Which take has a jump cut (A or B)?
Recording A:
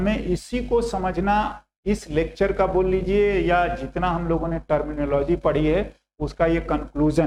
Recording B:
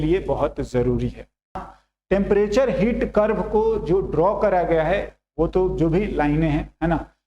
B